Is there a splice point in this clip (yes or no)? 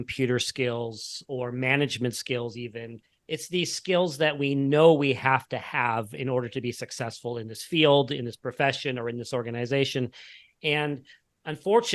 no